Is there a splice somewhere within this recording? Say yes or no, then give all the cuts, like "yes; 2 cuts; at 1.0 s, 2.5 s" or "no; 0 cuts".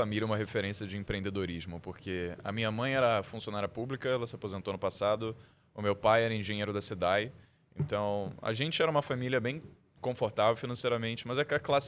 no; 0 cuts